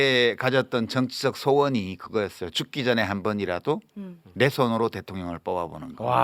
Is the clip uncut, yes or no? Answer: yes